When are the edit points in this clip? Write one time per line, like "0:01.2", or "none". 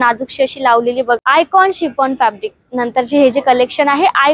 0:01.2